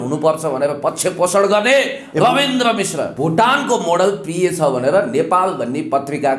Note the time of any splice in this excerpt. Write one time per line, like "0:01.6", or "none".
0:03.1